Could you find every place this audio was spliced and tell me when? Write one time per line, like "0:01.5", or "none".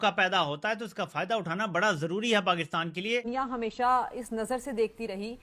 0:03.2